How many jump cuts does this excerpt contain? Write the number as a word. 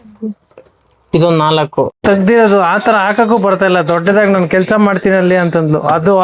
one